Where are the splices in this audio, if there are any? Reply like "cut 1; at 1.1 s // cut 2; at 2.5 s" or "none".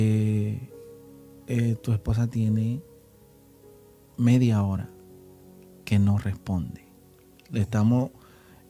none